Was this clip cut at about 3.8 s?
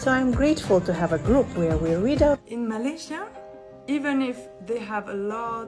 no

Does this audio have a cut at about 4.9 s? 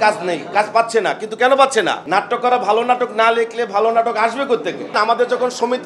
yes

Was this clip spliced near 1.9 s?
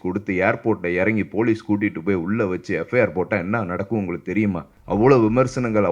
no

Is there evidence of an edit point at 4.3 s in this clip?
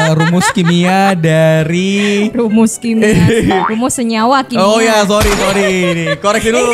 no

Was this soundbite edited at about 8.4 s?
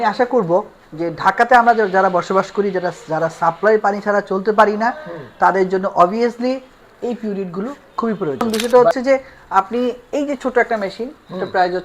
yes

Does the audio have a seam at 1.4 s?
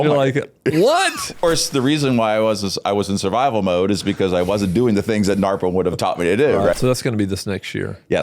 yes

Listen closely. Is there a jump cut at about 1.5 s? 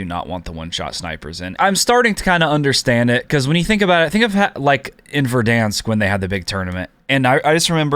yes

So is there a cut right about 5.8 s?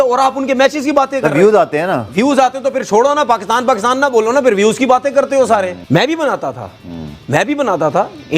yes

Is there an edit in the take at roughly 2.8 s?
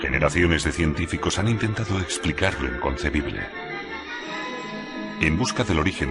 yes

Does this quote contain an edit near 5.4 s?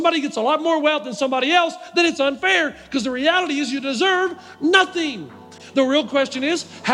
yes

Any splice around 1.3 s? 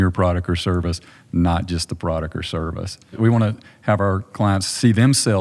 no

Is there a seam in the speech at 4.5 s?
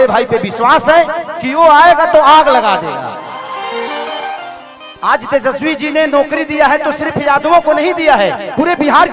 yes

